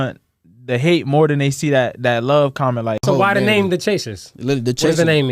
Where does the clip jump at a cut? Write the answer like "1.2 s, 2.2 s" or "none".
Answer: 3.0 s